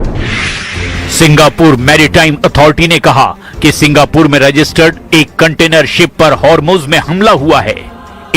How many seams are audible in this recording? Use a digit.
1